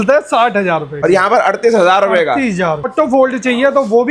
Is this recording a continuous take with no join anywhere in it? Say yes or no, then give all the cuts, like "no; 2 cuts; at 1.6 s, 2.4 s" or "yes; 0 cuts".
no; 2 cuts; at 1.0 s, 2.9 s